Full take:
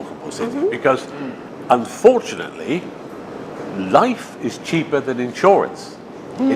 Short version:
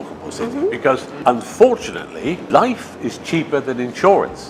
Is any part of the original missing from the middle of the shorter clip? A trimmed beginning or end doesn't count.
yes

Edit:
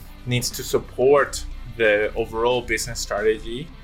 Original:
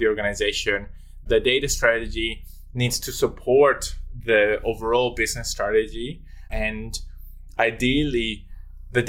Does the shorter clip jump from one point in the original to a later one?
no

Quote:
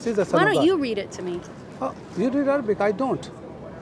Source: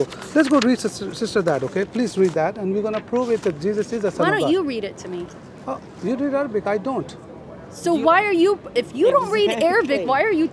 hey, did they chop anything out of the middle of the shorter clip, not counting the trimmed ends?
no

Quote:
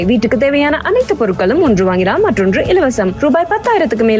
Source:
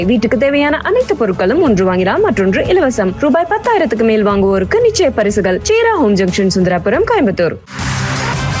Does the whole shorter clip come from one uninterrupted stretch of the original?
yes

